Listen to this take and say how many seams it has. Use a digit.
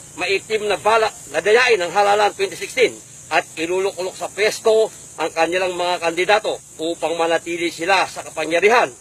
0